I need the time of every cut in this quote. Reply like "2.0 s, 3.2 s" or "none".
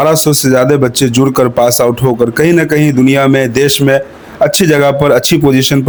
none